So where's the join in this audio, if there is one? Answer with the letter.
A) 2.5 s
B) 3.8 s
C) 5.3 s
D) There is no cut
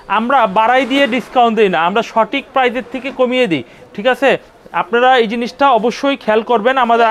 D